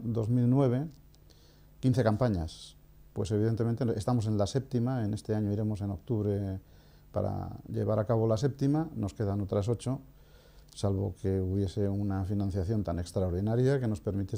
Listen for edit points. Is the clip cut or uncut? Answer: uncut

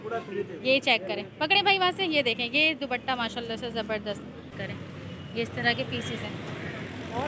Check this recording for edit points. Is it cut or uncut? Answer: cut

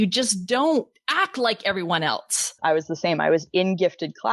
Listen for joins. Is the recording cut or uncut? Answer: cut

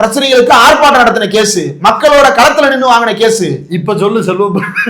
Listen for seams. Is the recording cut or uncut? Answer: uncut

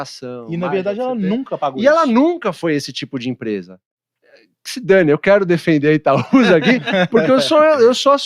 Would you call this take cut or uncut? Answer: cut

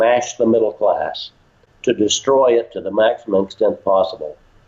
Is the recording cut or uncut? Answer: uncut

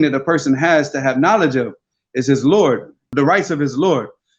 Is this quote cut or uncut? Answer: cut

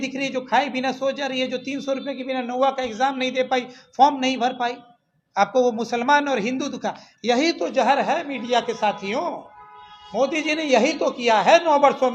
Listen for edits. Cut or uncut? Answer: uncut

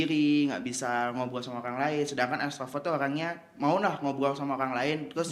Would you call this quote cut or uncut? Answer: uncut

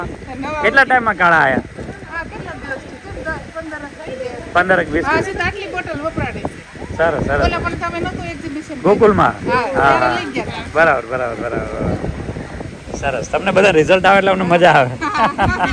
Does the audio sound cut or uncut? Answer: uncut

